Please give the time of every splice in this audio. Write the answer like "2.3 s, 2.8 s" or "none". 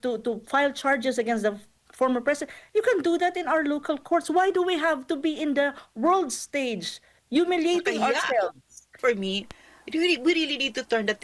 9.0 s